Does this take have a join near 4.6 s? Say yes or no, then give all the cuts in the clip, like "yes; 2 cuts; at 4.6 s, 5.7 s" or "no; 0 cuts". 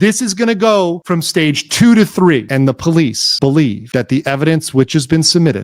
no; 1 cut; at 2.9 s